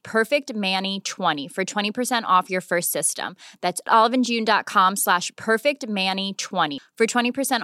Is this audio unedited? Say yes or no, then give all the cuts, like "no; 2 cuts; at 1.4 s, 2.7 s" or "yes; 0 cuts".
no; 1 cut; at 1.4 s